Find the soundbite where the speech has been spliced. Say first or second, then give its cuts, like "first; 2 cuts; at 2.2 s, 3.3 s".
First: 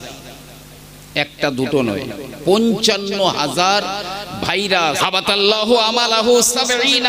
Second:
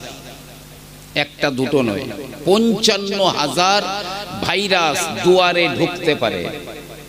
first; 1 cut; at 5.0 s